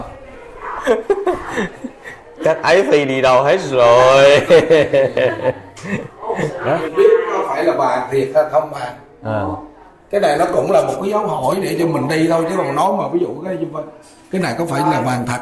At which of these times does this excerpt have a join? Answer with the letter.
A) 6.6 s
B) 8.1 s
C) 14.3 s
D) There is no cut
A